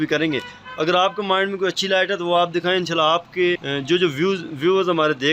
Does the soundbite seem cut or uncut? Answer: cut